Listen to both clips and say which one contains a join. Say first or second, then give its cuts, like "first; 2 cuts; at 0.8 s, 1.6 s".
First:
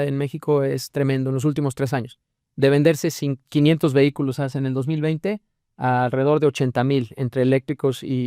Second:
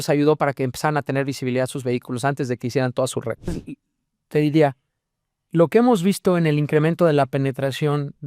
second; 1 cut; at 3.6 s